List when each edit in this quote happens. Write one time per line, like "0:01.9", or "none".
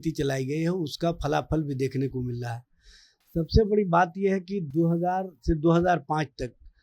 none